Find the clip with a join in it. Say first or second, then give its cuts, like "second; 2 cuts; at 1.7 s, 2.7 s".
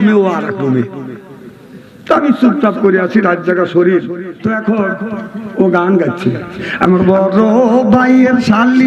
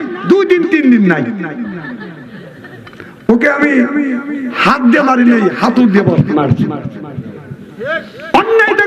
first; 1 cut; at 4.3 s